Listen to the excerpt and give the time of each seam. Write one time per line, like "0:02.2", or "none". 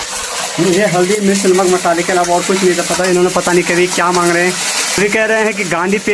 0:05.0